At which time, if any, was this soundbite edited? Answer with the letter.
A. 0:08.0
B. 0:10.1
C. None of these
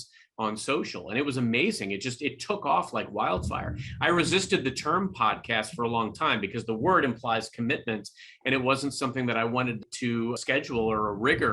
B